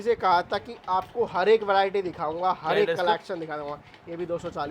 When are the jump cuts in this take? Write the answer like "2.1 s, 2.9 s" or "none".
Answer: none